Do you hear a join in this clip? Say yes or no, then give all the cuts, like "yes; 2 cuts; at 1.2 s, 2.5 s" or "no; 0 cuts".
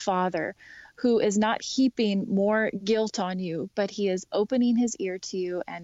no; 0 cuts